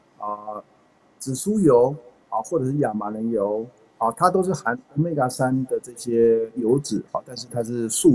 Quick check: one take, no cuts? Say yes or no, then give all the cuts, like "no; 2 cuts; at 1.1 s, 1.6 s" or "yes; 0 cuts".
yes; 0 cuts